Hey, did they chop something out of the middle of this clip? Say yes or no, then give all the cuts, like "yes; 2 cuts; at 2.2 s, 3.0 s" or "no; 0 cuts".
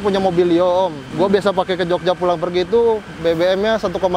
yes; 1 cut; at 1.0 s